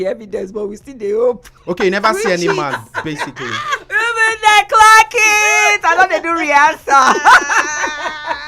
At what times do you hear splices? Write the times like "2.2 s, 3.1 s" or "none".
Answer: none